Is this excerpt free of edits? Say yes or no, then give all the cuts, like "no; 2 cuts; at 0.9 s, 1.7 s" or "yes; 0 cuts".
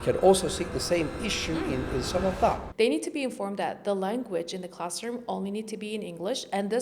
no; 1 cut; at 2.6 s